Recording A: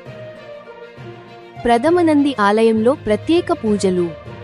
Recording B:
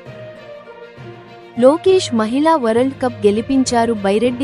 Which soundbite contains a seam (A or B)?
B